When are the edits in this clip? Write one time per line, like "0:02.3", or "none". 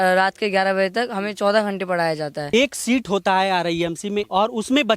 0:02.5
0:04.2